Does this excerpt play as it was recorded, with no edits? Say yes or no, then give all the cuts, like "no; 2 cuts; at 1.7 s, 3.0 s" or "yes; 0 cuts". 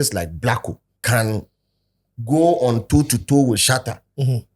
no; 2 cuts; at 0.9 s, 3.6 s